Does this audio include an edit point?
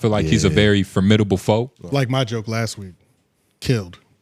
yes; 1 cut; at 1.7 s

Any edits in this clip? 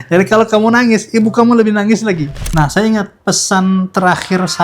yes; 1 cut; at 2.4 s

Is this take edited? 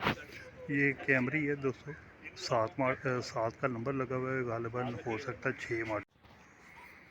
yes; 1 cut; at 6.0 s

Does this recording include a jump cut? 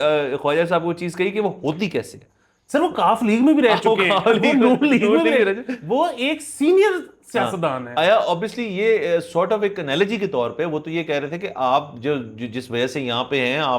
no; 0 cuts

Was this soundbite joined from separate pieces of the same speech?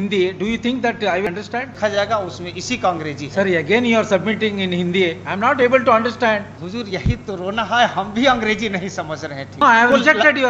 yes; 3 cuts; at 1.3 s, 6.6 s, 9.6 s

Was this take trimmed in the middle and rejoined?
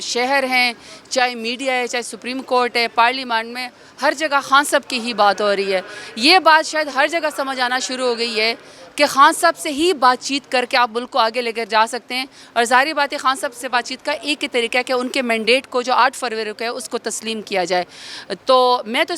no; 0 cuts

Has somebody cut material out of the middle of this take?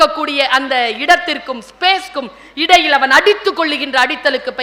no; 0 cuts

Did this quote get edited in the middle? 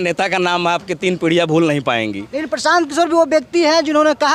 no; 0 cuts

